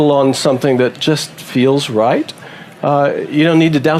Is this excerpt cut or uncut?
uncut